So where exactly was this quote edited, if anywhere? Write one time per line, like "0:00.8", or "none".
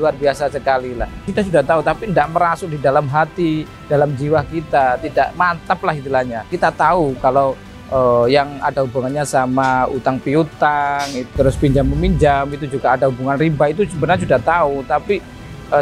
0:01.1
0:06.5
0:11.3